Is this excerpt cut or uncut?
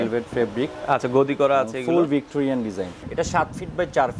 cut